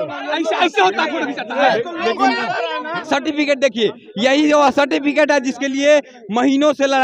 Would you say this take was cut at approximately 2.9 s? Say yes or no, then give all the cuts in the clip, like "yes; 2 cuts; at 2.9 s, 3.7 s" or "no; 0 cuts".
yes; 1 cut; at 2.9 s